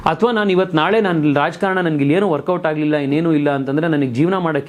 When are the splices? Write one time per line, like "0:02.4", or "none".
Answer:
none